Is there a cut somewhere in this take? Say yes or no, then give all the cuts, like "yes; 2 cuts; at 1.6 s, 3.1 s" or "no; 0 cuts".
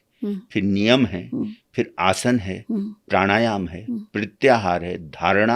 no; 0 cuts